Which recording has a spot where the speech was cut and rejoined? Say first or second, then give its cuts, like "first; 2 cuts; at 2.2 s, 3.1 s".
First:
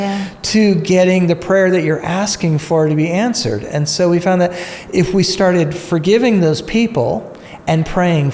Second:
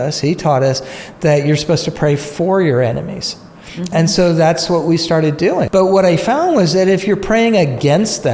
second; 1 cut; at 5.7 s